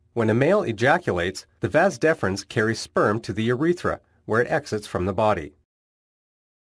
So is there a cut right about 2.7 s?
no; 0 cuts

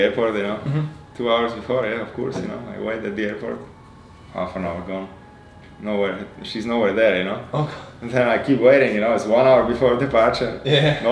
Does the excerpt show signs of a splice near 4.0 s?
no; 1 cut; at 1.0 s

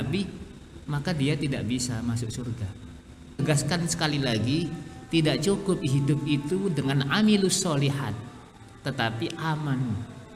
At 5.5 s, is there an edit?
no; 1 cut; at 3.4 s

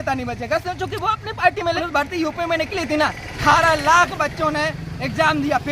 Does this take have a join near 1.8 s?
yes; 2 cuts; at 1.8 s, 3.3 s

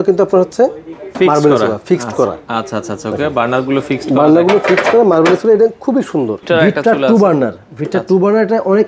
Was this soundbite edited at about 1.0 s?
no; 1 cut; at 6.4 s

